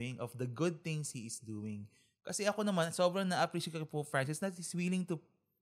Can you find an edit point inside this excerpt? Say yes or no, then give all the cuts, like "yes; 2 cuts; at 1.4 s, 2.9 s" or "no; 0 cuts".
no; 0 cuts